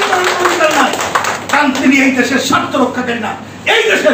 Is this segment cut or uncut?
uncut